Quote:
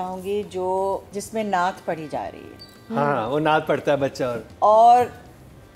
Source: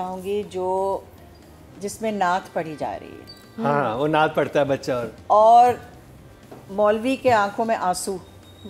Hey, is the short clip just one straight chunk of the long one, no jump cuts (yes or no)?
no